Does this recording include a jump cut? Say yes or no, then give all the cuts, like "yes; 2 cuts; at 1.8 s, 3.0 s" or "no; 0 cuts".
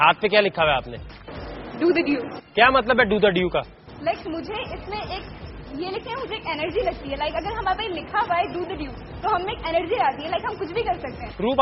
yes; 1 cut; at 2.8 s